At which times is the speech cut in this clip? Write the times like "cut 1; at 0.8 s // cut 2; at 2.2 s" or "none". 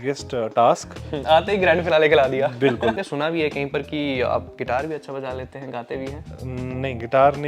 cut 1; at 3.0 s